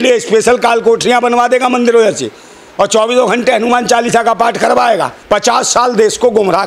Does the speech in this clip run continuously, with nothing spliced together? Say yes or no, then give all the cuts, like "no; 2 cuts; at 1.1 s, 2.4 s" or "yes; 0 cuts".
no; 1 cut; at 5.2 s